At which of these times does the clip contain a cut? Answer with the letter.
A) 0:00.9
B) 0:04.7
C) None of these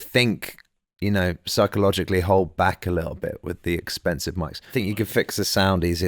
B